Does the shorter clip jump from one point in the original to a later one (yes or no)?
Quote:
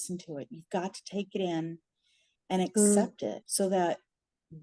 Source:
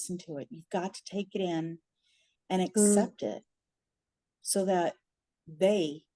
yes